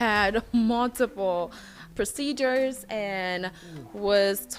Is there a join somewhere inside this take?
yes; 1 cut; at 1.7 s

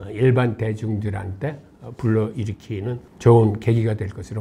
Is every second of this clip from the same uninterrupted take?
yes; 0 cuts

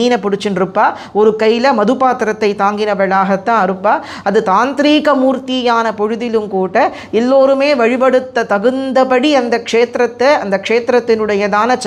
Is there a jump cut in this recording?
no; 0 cuts

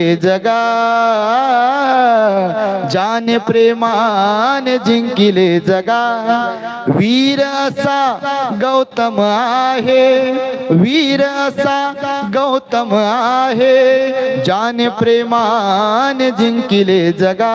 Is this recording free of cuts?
yes; 0 cuts

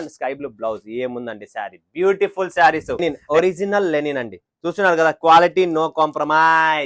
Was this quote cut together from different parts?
yes; 1 cut; at 3.0 s

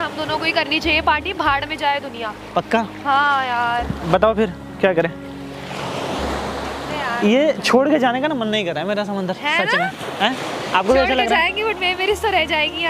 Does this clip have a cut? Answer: no; 0 cuts

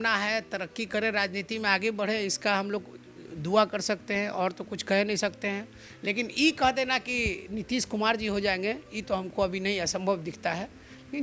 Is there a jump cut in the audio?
no; 0 cuts

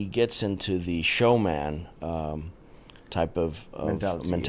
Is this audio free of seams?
yes; 0 cuts

